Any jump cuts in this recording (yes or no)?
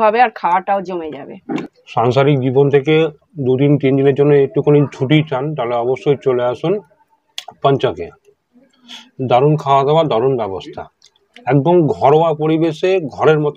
yes